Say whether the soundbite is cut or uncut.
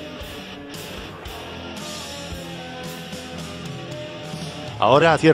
cut